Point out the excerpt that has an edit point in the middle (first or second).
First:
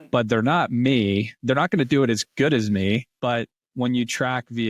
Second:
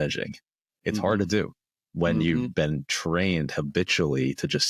first